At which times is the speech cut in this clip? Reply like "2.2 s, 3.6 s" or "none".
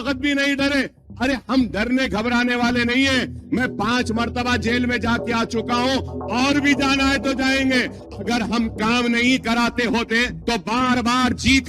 8.0 s, 10.3 s